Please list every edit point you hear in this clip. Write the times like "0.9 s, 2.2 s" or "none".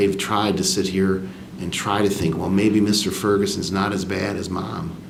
none

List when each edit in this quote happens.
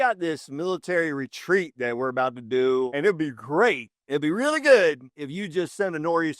2.9 s

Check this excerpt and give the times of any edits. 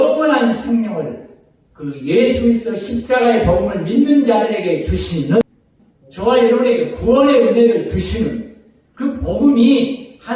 5.4 s

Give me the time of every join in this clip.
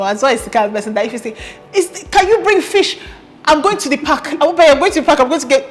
none

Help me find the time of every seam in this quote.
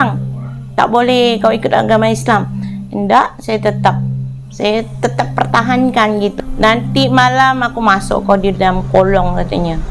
6.3 s

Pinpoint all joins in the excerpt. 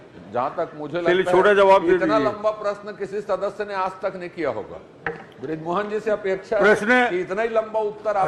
none

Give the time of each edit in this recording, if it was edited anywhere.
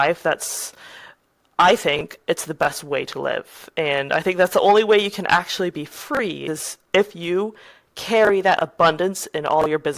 none

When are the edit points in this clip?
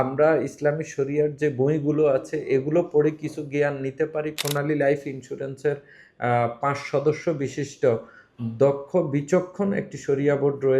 4.4 s

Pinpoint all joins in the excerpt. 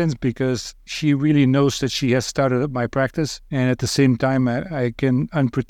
0.9 s, 3.4 s

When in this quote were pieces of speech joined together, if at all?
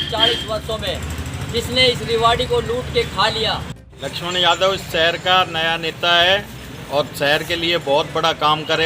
3.9 s

